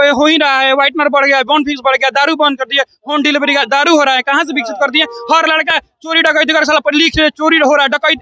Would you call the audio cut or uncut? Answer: uncut